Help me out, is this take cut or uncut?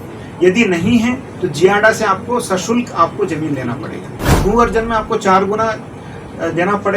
cut